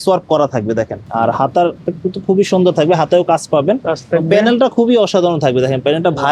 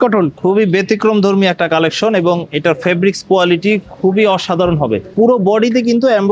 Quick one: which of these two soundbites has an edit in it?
first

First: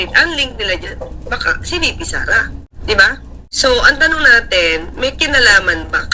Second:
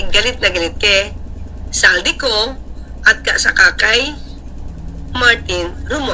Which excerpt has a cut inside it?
first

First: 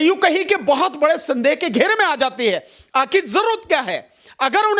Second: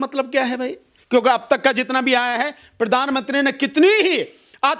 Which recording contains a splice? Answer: second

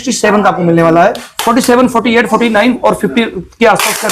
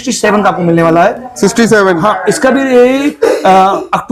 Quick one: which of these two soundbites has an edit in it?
first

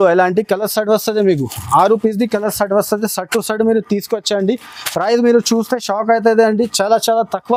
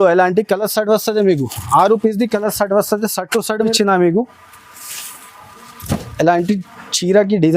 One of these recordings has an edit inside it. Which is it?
second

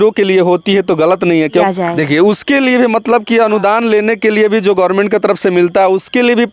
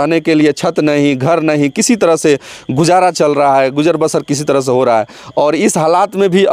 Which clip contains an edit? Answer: first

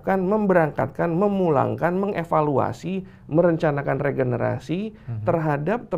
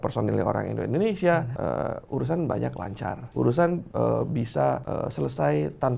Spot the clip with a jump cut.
second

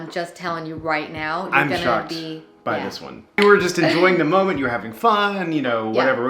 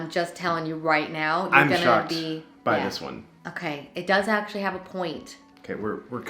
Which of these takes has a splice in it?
first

